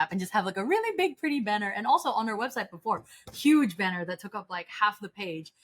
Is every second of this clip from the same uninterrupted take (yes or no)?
yes